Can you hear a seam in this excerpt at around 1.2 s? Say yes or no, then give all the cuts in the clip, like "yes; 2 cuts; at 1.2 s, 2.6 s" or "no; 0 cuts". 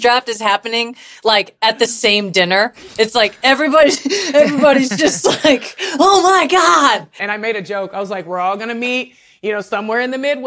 no; 1 cut; at 7.2 s